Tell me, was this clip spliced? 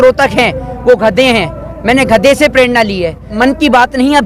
yes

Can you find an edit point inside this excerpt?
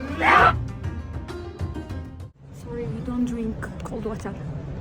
yes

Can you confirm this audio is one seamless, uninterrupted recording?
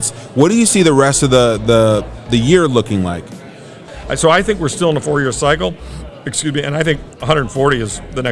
no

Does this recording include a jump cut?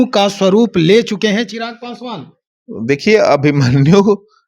no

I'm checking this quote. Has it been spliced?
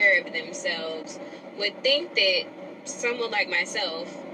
no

